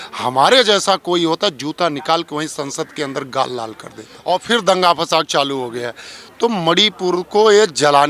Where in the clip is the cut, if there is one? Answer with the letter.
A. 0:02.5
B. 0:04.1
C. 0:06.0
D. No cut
B